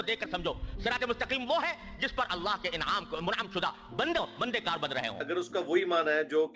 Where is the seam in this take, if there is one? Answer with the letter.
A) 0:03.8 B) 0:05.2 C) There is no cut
B